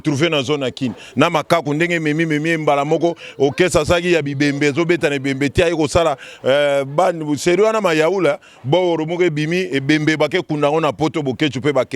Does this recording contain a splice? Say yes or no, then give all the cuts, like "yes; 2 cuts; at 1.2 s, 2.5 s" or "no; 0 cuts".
no; 0 cuts